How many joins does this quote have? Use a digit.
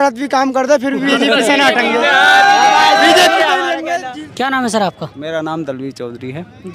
0